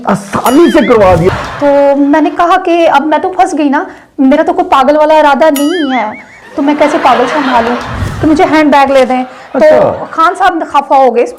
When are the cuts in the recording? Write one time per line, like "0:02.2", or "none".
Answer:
0:01.3
0:08.0